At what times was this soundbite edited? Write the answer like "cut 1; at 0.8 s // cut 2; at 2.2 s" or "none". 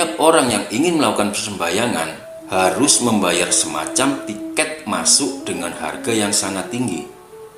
none